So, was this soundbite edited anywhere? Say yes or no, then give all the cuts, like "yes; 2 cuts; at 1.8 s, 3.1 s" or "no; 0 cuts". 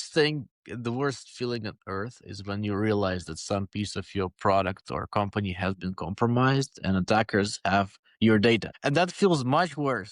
yes; 1 cut; at 8.7 s